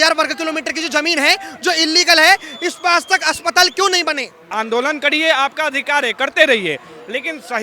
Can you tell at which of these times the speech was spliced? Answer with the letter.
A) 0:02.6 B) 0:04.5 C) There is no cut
B